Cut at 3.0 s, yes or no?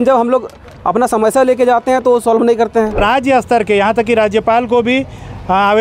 yes